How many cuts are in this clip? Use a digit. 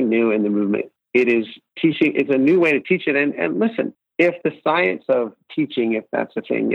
3